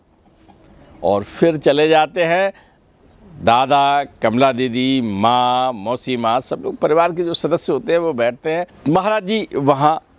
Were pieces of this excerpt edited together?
yes; 1 cut; at 8.7 s

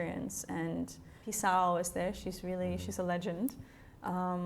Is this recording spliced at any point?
yes; 1 cut; at 1.2 s

